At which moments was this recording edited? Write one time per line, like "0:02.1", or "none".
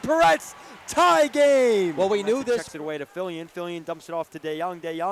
0:02.7